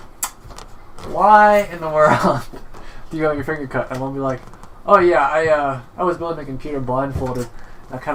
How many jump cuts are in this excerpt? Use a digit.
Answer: 0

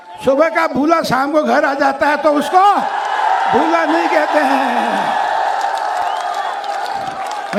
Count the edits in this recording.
0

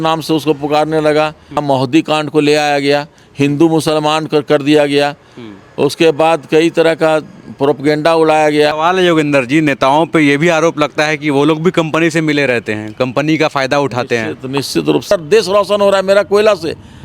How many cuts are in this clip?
3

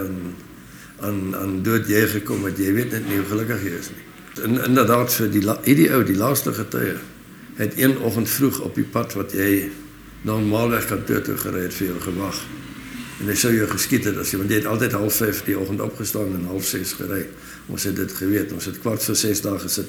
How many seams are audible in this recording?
1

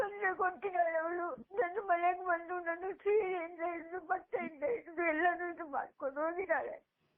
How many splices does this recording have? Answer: 0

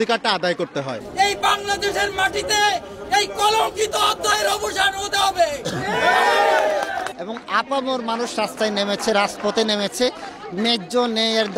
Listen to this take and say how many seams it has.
2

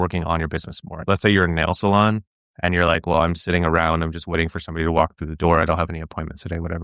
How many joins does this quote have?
1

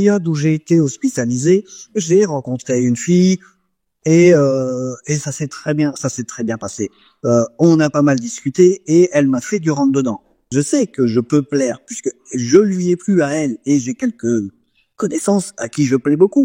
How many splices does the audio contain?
0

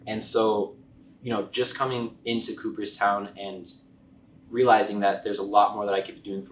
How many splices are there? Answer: 0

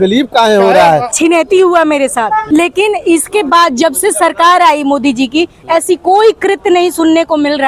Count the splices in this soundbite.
2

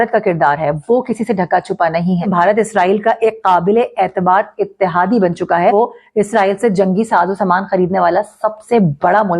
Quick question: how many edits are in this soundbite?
2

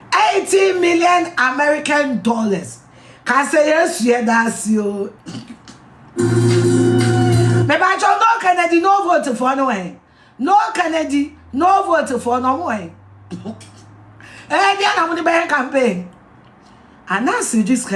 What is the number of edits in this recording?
0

